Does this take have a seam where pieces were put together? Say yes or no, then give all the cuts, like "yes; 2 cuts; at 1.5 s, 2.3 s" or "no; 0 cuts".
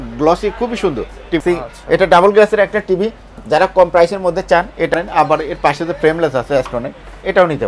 yes; 2 cuts; at 1.4 s, 4.9 s